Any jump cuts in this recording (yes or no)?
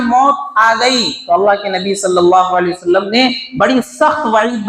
no